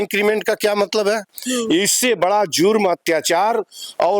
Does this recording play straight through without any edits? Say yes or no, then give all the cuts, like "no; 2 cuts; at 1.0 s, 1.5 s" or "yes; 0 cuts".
no; 1 cut; at 1.3 s